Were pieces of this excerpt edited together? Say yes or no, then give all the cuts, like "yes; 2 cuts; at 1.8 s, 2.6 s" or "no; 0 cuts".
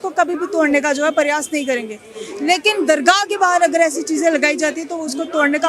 no; 0 cuts